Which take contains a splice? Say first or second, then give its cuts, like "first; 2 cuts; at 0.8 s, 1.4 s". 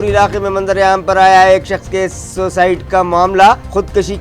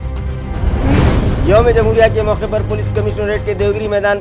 second; 1 cut; at 1.3 s